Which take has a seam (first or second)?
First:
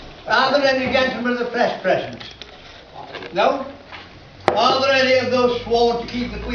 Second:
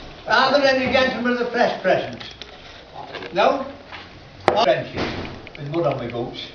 first